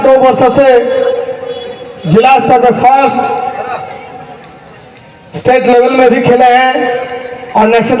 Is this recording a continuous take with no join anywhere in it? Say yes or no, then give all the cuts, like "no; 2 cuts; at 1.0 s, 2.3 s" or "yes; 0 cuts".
yes; 0 cuts